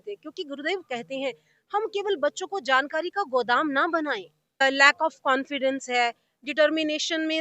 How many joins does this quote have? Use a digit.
1